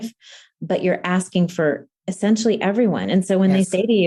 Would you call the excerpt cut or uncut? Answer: uncut